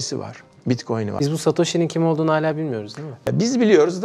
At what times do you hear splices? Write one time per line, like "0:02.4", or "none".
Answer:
0:01.1
0:03.3